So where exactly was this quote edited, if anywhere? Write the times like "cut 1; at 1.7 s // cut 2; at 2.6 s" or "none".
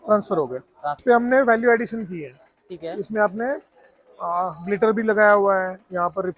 cut 1; at 1.0 s